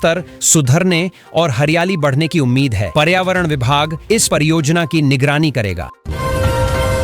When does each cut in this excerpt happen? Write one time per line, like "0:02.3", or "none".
0:05.9